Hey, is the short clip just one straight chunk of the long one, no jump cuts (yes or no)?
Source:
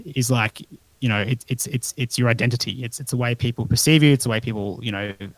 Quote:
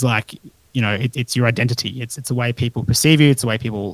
no